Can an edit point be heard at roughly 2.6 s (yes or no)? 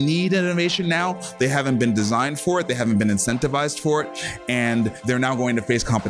no